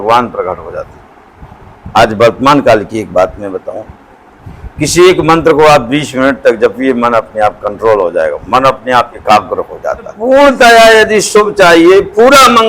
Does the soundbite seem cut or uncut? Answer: cut